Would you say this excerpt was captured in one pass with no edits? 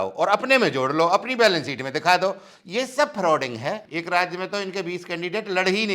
no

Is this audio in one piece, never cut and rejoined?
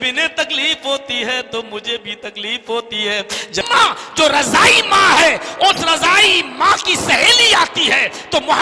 no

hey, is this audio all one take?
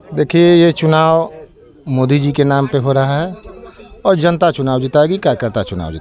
yes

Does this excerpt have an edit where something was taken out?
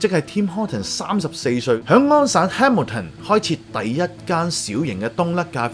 no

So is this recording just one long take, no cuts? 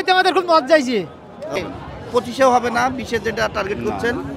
no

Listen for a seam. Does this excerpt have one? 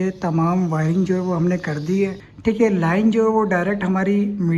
yes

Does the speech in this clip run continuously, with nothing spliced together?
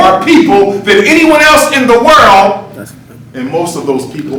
yes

